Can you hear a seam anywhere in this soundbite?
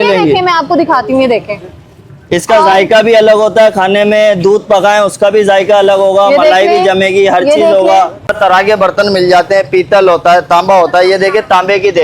yes; 1 cut; at 8.3 s

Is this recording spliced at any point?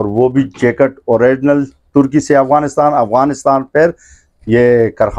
no; 0 cuts

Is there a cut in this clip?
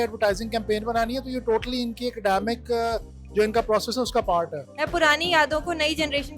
yes; 1 cut; at 4.6 s

